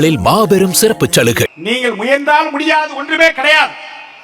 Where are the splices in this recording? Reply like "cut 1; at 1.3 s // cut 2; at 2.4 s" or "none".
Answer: cut 1; at 1.6 s